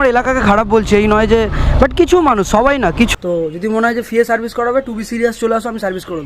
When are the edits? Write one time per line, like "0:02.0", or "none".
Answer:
0:03.1